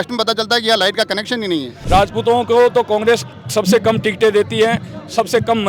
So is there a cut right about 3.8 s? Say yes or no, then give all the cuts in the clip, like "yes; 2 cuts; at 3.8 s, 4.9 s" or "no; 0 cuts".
no; 1 cut; at 1.7 s